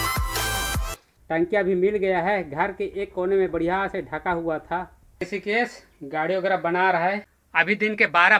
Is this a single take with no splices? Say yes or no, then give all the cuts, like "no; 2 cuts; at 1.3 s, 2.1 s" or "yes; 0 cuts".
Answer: yes; 0 cuts